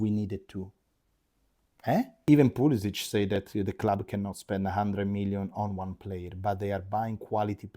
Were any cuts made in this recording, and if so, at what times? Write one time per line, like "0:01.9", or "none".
0:02.1